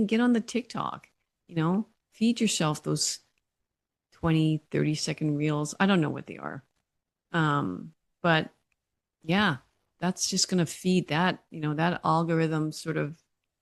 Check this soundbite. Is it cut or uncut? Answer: uncut